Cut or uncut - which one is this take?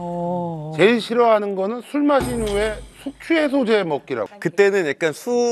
cut